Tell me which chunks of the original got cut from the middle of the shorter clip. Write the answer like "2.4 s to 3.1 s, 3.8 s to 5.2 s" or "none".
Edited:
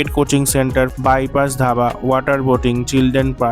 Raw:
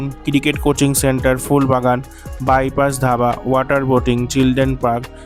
1.4 s to 2.4 s